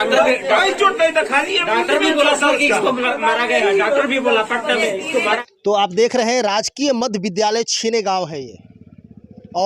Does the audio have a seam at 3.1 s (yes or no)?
no